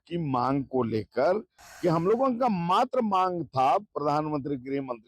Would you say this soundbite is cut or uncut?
uncut